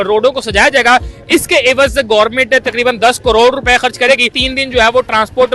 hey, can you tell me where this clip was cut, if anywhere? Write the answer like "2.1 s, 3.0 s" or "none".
4.4 s